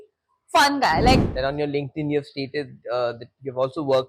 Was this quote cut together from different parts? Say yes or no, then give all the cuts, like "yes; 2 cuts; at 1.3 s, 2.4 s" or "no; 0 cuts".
yes; 1 cut; at 1.3 s